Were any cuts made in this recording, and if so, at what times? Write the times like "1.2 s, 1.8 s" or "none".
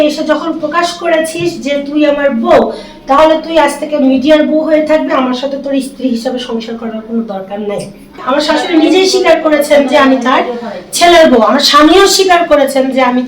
8.2 s